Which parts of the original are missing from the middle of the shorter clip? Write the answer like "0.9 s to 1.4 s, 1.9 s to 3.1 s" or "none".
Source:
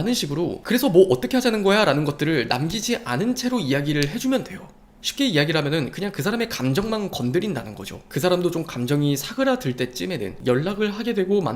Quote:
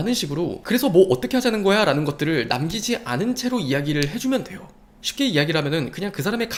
none